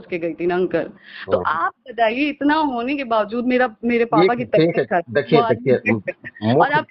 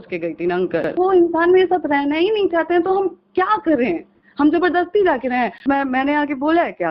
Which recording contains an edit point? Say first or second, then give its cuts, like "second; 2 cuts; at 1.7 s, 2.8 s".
second; 2 cuts; at 0.9 s, 5.6 s